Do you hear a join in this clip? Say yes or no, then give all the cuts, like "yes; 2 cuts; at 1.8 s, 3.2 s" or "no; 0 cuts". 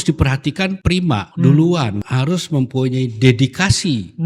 yes; 2 cuts; at 1.0 s, 2.0 s